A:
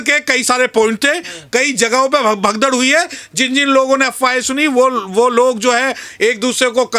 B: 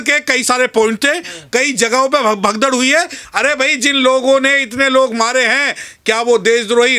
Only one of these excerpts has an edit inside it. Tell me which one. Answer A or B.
B